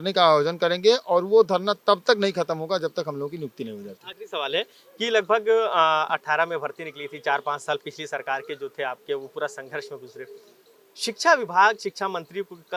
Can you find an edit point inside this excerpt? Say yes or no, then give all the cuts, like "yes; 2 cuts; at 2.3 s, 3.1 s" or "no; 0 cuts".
no; 0 cuts